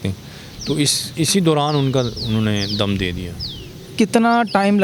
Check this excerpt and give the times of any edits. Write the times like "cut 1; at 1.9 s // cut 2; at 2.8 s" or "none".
none